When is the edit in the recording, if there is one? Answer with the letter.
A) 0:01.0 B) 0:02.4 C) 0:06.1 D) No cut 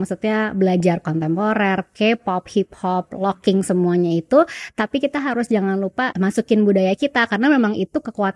C